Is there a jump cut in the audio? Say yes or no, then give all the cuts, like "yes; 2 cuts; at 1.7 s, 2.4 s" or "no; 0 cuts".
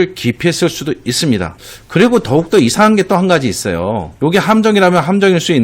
yes; 1 cut; at 1.5 s